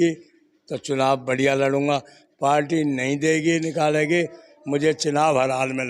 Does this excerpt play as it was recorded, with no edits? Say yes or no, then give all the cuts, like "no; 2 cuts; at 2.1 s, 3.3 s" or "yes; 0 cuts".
yes; 0 cuts